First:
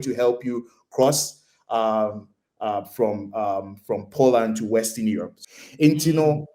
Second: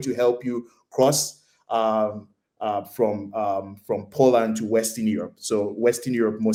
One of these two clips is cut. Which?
first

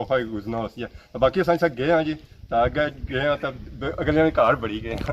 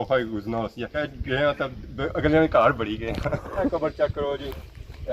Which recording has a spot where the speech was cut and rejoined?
second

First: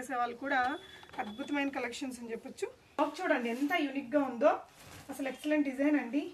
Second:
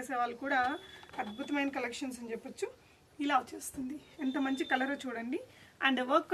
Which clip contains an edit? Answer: first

